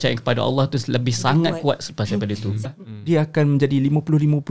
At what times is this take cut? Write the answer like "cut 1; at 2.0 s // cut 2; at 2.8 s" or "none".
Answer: cut 1; at 2.6 s